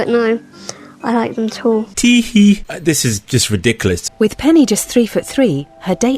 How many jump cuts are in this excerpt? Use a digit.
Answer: 3